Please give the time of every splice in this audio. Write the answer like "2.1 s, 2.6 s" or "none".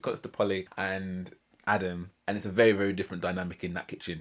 1.1 s, 2.1 s